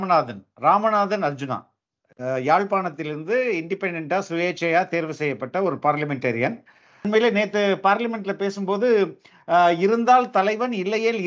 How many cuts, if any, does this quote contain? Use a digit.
1